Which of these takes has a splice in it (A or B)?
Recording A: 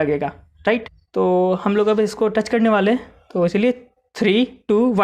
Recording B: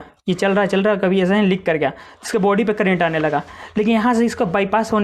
A